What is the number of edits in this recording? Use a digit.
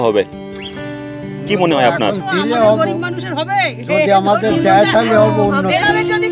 0